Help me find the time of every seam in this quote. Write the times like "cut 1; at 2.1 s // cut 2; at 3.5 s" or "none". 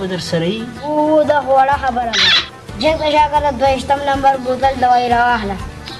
none